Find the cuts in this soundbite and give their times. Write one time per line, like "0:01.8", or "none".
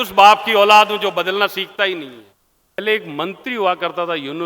0:02.8